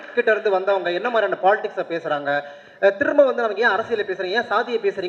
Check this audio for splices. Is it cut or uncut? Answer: uncut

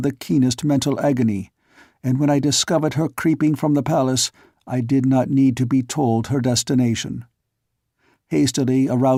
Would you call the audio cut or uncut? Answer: uncut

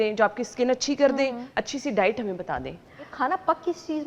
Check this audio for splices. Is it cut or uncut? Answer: cut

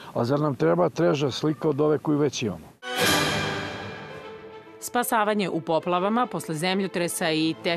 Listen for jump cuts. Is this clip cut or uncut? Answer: cut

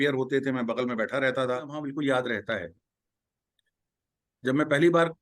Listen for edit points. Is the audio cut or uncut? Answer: cut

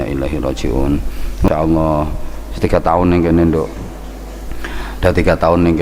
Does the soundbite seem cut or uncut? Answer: cut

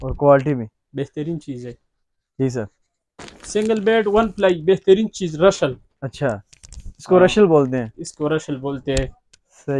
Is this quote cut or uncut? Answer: cut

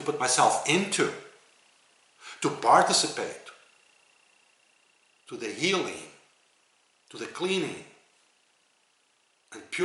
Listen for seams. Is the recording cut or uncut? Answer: uncut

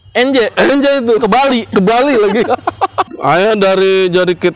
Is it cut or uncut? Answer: cut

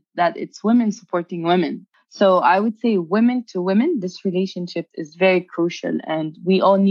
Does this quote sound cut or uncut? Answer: cut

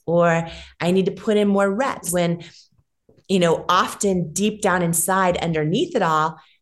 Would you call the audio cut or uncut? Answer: cut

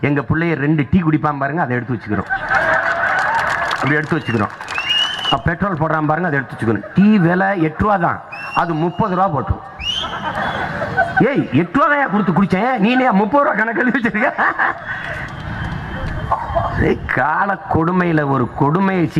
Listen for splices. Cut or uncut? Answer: uncut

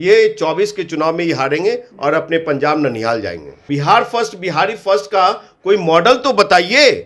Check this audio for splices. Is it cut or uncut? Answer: cut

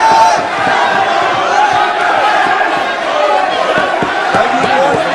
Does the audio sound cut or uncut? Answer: uncut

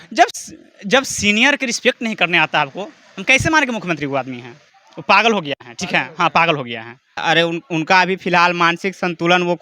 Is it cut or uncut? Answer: uncut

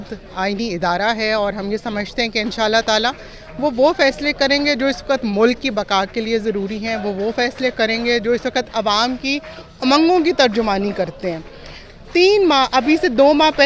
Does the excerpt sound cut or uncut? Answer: uncut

